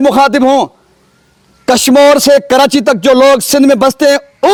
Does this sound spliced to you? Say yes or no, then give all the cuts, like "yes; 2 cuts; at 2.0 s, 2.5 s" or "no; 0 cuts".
no; 0 cuts